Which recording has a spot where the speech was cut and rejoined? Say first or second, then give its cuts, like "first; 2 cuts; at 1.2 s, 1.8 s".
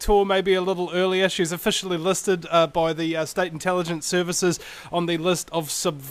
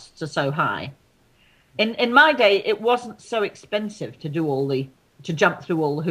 first; 1 cut; at 2.4 s